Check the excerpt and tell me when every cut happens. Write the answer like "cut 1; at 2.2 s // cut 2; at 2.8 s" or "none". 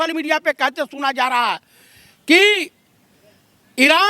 none